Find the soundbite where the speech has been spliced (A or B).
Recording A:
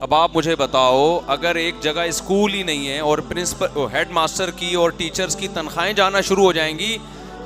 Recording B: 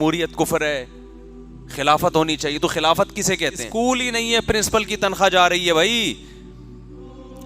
B